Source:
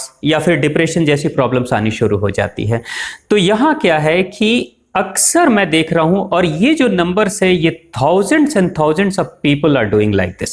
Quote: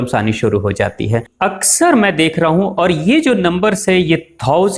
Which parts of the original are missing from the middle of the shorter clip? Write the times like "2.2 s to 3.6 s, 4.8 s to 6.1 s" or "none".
2.9 s to 4.8 s